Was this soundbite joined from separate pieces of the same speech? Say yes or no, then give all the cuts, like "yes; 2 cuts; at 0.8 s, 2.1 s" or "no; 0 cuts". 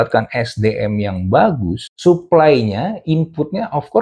yes; 1 cut; at 1.8 s